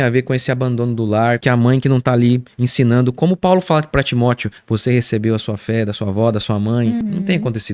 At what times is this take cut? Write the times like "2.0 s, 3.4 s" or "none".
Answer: 1.4 s, 4.5 s, 7.0 s